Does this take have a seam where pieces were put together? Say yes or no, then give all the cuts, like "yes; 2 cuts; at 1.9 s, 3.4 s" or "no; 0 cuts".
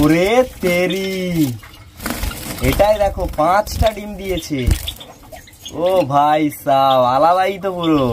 no; 0 cuts